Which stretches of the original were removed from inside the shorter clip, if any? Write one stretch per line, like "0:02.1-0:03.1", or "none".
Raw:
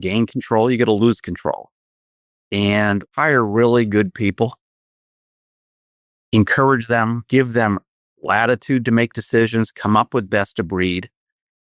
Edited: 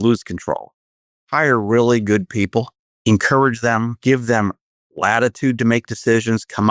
0:02.2-0:03.1
0:04.7-0:06.1

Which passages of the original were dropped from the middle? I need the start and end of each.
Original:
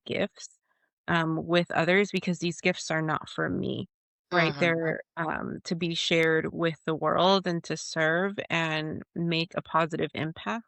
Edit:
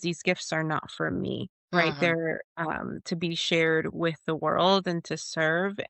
0:03.9-0:04.1

